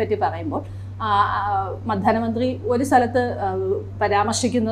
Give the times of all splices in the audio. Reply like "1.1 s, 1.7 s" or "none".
none